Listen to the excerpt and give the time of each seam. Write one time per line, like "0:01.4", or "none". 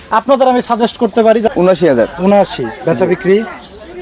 0:01.5